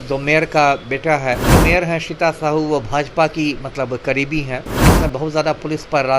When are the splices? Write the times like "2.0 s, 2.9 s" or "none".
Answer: 1.5 s, 4.9 s